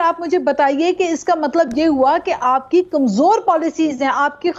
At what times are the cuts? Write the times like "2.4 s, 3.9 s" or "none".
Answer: none